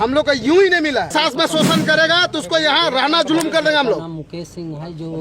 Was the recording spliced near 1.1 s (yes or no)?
yes